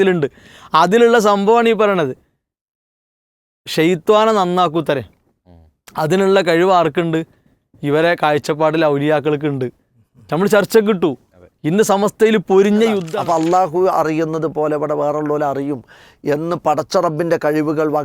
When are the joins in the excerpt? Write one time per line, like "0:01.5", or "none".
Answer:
0:13.1